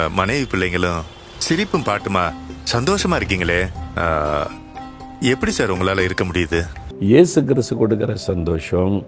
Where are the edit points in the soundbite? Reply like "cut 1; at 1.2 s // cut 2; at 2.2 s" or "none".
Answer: cut 1; at 6.8 s